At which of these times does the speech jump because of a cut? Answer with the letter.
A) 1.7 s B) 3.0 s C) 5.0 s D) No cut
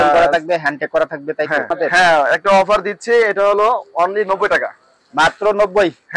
A